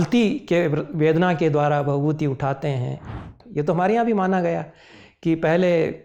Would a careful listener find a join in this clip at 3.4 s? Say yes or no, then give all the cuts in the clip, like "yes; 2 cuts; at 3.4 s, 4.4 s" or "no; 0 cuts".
yes; 1 cut; at 3.4 s